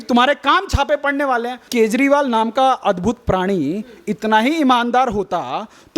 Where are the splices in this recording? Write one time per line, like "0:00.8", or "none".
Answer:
0:01.7